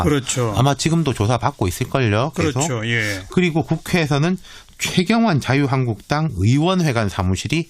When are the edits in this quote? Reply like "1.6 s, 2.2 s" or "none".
1.0 s